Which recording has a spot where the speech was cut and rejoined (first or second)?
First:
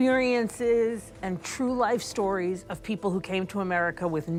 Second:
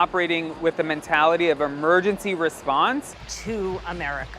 second